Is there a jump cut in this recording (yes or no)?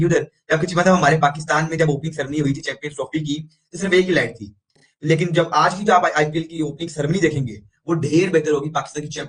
yes